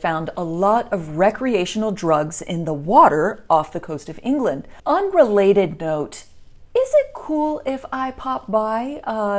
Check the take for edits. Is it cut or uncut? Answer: cut